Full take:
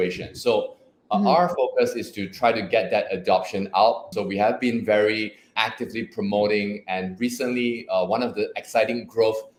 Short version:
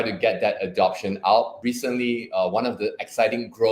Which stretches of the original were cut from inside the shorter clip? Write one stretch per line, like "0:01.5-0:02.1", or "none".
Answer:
0:04.0-0:07.1